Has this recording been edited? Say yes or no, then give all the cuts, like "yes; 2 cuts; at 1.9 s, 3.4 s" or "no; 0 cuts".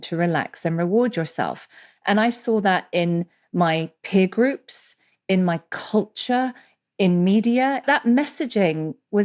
yes; 1 cut; at 7.8 s